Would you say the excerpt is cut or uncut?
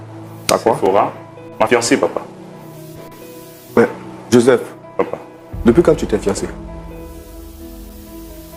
uncut